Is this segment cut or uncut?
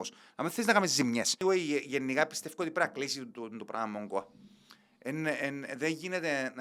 cut